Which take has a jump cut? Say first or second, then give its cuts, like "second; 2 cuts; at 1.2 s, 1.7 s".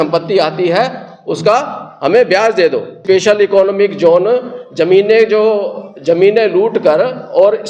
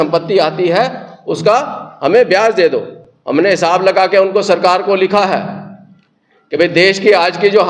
first; 1 cut; at 3.0 s